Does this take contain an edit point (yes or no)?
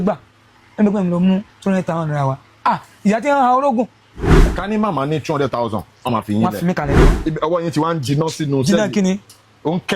yes